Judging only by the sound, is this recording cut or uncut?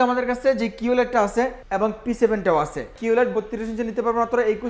cut